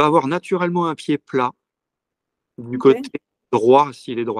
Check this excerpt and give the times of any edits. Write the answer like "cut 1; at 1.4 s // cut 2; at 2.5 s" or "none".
none